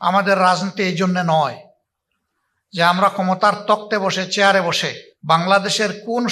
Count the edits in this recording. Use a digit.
1